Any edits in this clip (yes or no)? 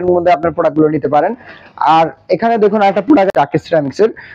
yes